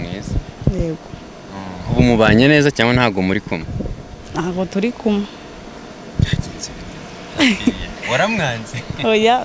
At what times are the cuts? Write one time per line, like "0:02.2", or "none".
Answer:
none